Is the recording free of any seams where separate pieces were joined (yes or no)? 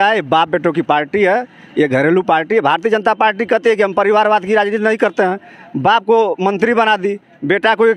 yes